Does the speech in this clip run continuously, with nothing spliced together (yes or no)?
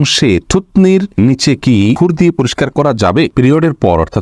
no